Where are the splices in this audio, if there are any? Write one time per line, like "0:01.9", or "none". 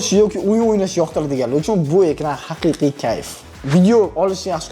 0:03.3